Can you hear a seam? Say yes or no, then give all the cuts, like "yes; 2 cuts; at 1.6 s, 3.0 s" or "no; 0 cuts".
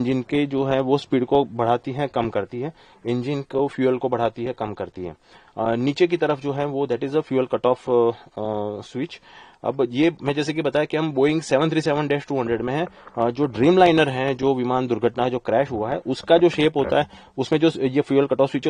no; 0 cuts